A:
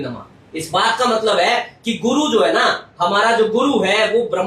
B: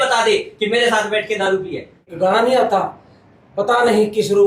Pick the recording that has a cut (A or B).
B